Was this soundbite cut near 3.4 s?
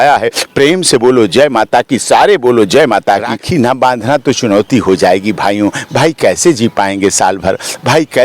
yes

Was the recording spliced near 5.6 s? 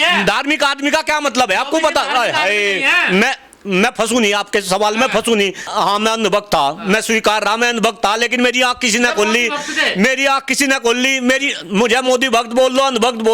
yes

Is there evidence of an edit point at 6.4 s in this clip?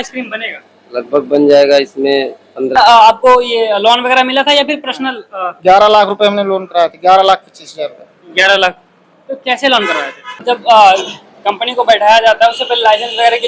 no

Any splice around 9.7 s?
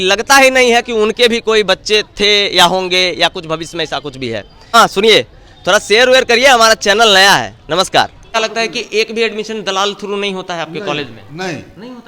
no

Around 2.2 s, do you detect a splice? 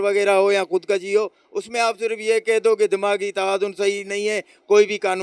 no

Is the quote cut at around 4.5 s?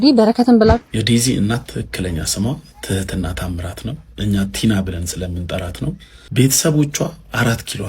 no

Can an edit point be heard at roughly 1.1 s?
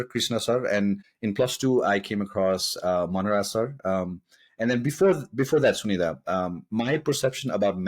yes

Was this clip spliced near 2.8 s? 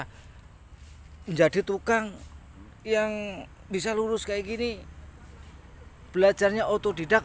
no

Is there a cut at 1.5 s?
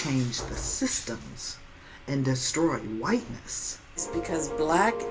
no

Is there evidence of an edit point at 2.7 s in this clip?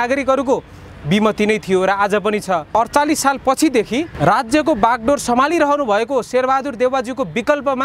yes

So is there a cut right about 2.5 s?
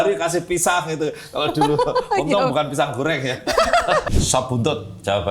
no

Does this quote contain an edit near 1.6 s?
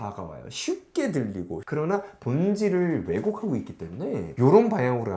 yes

